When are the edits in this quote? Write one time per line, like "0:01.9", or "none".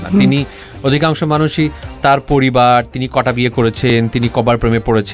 none